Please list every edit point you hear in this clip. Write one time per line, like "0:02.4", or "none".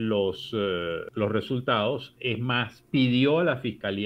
0:01.1